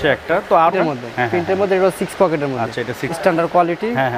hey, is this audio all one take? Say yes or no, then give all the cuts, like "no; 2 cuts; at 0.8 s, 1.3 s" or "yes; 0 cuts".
no; 2 cuts; at 0.7 s, 3.0 s